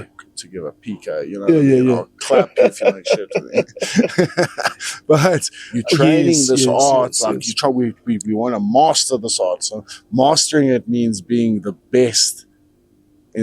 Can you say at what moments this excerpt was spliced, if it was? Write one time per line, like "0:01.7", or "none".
0:05.6